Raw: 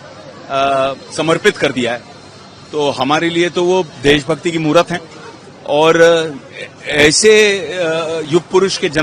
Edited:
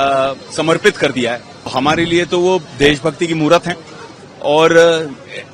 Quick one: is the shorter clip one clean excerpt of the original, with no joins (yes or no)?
no